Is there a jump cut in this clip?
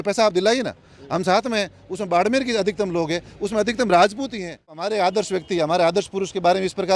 yes; 1 cut; at 4.8 s

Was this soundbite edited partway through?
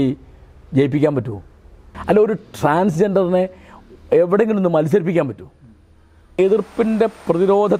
yes; 2 cuts; at 1.9 s, 6.3 s

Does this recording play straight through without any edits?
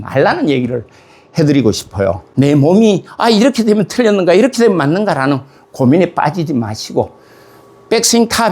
no; 1 cut; at 2.2 s

